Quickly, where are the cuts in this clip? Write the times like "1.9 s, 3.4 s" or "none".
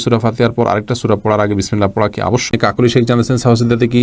2.5 s